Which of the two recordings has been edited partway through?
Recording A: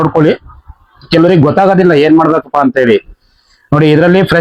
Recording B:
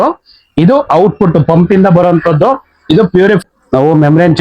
B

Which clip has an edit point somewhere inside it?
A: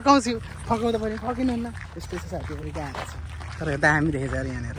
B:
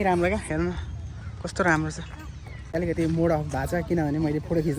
B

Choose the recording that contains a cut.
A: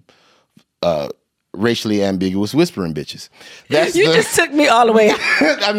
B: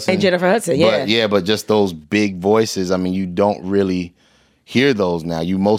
A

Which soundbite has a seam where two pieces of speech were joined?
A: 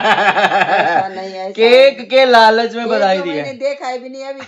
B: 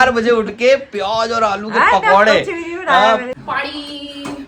B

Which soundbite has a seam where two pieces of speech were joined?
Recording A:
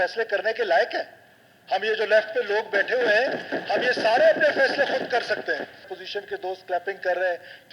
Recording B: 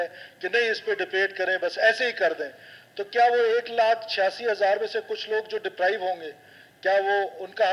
A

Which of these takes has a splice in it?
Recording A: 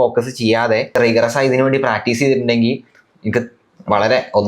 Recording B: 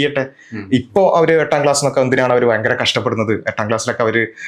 A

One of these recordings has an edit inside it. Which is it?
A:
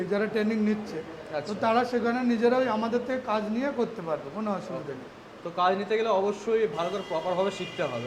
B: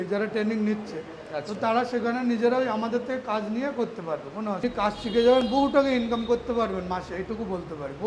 B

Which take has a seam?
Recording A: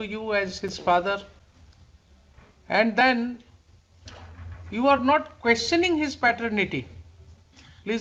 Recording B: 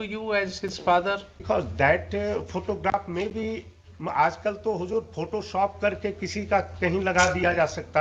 B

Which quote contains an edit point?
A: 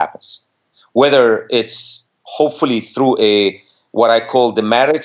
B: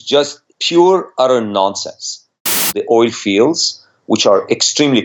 B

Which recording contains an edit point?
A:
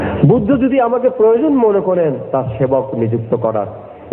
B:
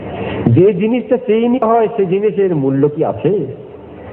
B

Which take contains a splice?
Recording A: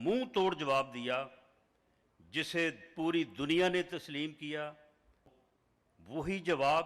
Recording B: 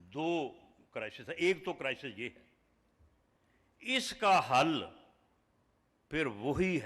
A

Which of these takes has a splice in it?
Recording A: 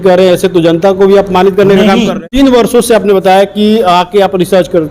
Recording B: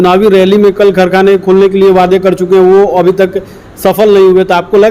A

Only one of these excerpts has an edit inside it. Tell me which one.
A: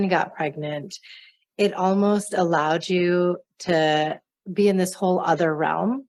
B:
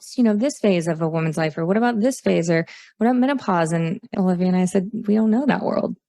B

